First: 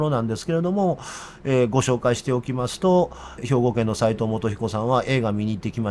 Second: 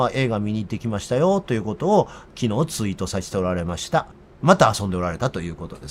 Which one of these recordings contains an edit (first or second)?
second